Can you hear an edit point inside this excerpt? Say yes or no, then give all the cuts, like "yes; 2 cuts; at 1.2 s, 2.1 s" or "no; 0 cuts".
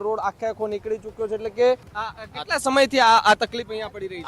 yes; 1 cut; at 1.9 s